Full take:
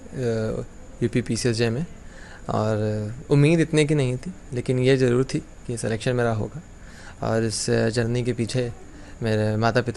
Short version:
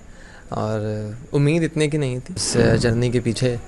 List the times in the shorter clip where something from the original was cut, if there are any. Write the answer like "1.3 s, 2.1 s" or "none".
2.4 s